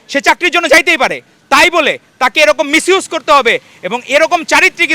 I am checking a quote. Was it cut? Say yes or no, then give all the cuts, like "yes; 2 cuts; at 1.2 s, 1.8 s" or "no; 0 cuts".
no; 0 cuts